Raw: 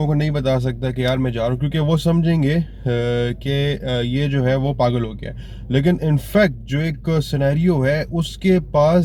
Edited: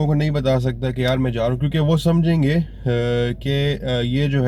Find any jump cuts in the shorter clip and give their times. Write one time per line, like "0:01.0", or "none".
none